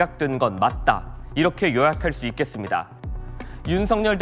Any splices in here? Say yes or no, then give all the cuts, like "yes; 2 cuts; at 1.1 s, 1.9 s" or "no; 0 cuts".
yes; 1 cut; at 3.2 s